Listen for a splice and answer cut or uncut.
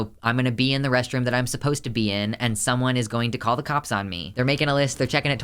cut